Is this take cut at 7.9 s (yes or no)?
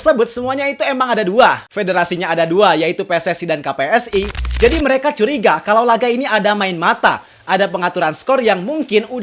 no